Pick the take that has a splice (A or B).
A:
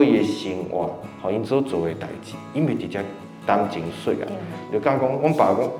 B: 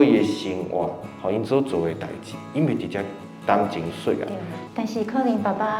B